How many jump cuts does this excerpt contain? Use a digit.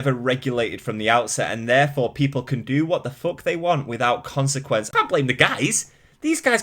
1